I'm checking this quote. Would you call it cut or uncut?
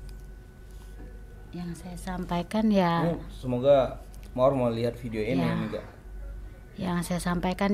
uncut